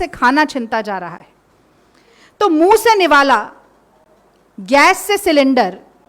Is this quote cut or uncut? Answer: uncut